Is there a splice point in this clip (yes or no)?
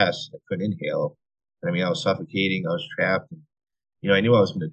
no